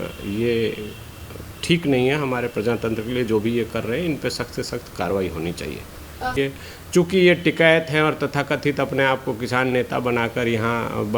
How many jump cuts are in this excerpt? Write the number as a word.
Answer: one